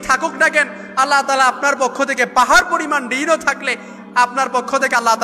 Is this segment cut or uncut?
uncut